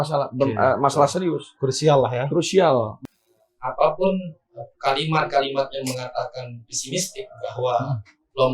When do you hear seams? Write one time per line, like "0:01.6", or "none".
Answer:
0:03.0